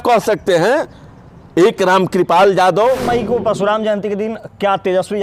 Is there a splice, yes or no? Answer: yes